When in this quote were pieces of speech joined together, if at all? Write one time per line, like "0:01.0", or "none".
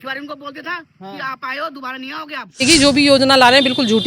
0:02.6